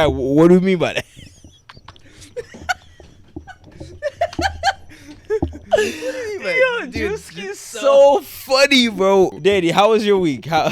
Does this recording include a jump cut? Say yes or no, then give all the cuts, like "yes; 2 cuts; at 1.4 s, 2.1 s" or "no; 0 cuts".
yes; 1 cut; at 9.3 s